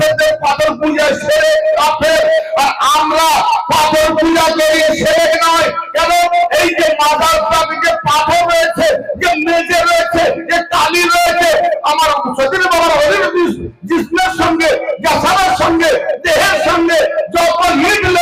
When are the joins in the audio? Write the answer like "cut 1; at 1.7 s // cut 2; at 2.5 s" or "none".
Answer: none